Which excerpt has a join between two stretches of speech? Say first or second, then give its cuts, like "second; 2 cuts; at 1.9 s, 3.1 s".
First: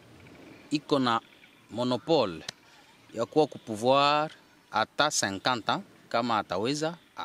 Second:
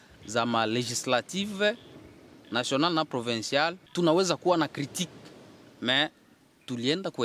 second; 1 cut; at 3.8 s